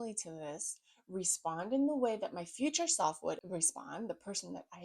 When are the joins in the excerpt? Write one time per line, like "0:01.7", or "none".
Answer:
0:03.4